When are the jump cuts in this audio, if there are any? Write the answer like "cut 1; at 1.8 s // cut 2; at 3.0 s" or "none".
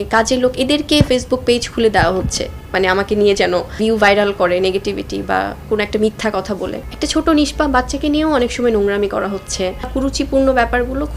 cut 1; at 3.7 s // cut 2; at 6.8 s // cut 3; at 9.9 s